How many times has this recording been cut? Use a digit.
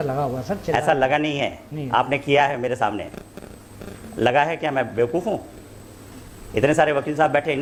0